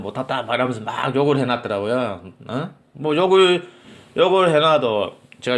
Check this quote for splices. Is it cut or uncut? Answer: uncut